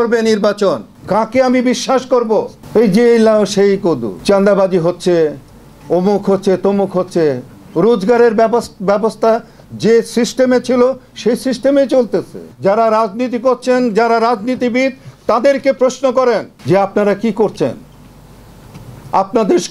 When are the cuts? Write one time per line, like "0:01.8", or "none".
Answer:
0:00.9
0:02.6
0:04.1
0:12.5
0:16.5